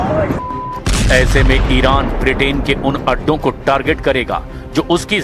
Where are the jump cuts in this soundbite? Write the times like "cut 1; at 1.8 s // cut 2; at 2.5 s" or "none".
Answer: none